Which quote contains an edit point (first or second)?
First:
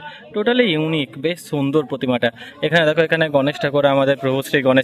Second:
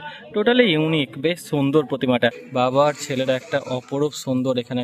second